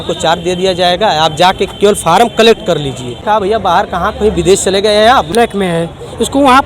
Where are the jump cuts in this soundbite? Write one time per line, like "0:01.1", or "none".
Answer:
0:03.2
0:05.0